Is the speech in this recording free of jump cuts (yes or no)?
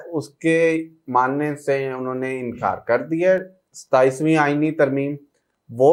yes